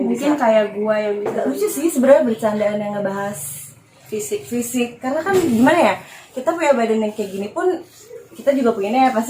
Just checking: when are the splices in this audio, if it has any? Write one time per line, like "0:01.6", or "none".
0:01.4